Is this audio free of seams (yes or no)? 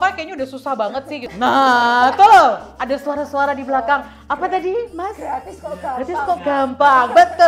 no